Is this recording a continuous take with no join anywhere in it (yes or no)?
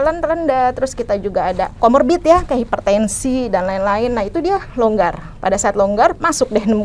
yes